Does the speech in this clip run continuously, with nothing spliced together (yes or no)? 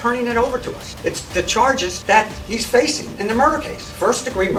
yes